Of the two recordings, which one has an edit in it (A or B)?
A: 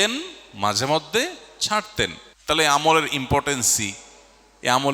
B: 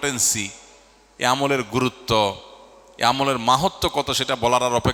A